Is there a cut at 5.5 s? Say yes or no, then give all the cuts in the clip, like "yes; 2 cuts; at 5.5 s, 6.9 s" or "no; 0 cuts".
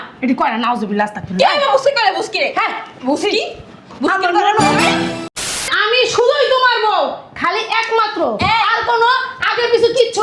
yes; 1 cut; at 5.5 s